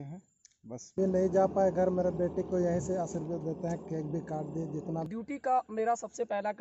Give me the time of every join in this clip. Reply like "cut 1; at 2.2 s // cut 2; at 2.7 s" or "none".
cut 1; at 0.9 s // cut 2; at 5.1 s